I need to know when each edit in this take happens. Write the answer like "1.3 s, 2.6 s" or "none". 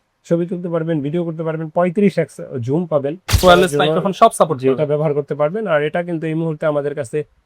3.4 s